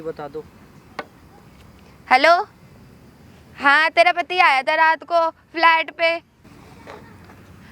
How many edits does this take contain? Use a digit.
1